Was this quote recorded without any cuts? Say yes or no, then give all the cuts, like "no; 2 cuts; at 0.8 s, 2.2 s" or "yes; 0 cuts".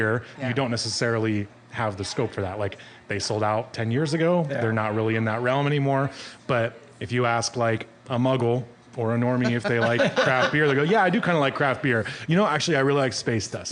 yes; 0 cuts